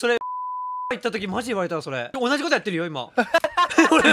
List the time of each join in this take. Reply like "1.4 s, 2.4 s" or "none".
2.1 s